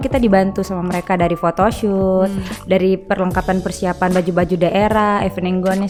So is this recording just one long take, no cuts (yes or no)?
yes